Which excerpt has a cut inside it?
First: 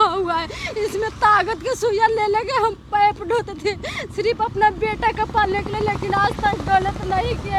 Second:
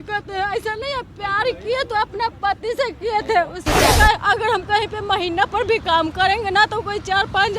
second; 1 cut; at 3.9 s

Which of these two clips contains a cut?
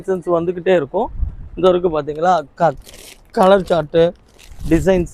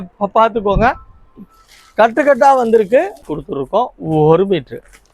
second; 1 cut; at 3.3 s

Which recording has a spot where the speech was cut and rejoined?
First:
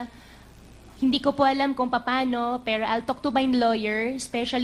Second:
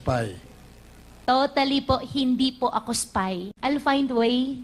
second; 1 cut; at 3.5 s

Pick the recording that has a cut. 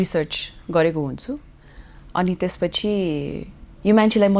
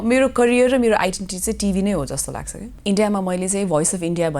second; 1 cut; at 2.7 s

